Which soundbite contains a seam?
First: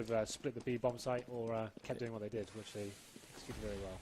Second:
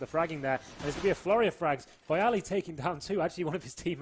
second; 1 cut; at 1.6 s

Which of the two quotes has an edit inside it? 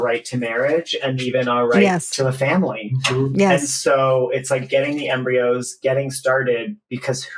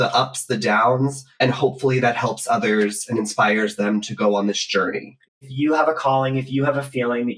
second; 1 cut; at 5.4 s

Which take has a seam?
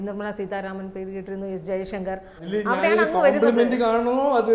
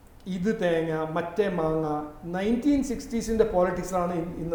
first; 1 cut; at 2.5 s

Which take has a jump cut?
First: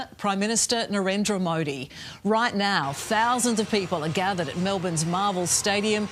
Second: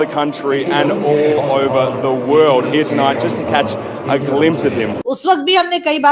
second; 1 cut; at 5.0 s

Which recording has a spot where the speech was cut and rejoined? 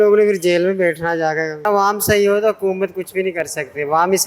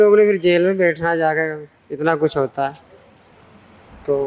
first; 1 cut; at 1.6 s

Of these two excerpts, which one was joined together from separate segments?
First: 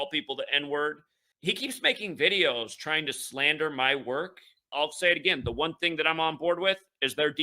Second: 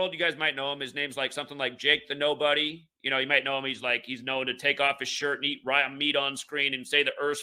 first; 2 cuts; at 1.2 s, 4.6 s

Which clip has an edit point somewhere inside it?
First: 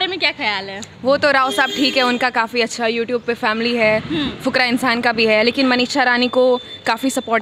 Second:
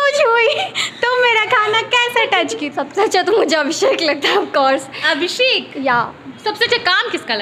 second; 2 cuts; at 2.7 s, 6.2 s

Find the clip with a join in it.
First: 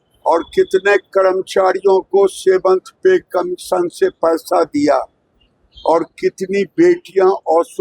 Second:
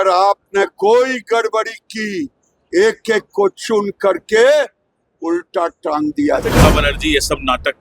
second; 1 cut; at 6.6 s

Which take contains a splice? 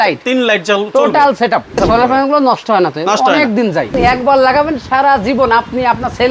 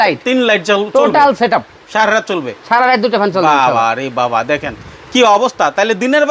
first; 2 cuts; at 1.8 s, 3.9 s

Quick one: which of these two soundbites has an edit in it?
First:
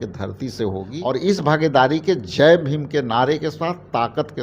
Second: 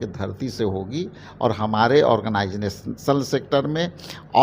first; 1 cut; at 1.0 s

